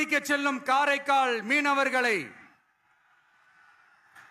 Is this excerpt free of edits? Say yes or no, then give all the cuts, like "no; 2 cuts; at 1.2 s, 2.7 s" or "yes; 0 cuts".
yes; 0 cuts